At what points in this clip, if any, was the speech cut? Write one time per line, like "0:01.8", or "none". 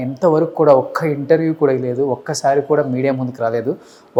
none